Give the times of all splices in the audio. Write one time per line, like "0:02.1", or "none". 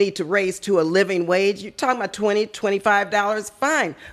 none